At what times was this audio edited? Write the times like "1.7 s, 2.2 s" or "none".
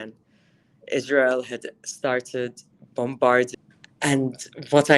3.5 s